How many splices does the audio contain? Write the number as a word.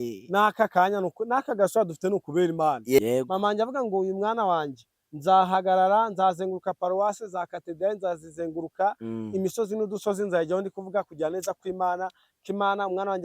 one